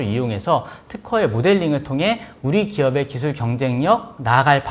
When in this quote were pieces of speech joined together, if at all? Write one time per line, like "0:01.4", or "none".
0:02.3